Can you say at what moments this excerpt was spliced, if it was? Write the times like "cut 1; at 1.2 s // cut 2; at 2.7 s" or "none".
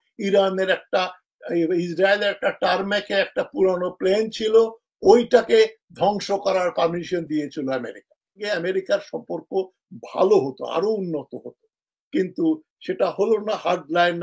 cut 1; at 8.3 s

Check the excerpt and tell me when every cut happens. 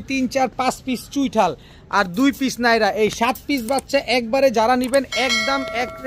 none

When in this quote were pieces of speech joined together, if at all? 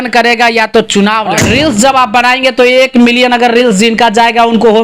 cut 1; at 1.3 s

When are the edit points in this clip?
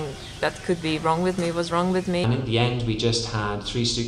cut 1; at 2.2 s

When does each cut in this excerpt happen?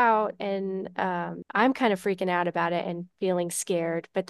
cut 1; at 1.4 s

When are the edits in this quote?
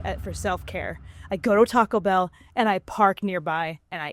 none

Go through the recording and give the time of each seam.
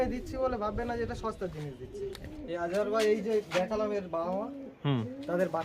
cut 1; at 2.3 s

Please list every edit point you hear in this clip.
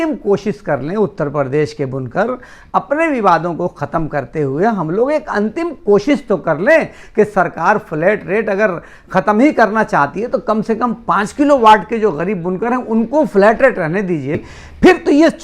cut 1; at 14.3 s

